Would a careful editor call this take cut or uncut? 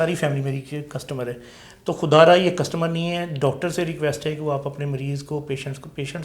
uncut